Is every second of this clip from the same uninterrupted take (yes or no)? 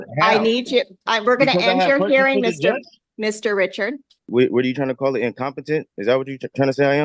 no